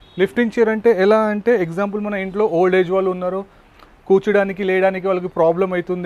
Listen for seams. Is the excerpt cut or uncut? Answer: uncut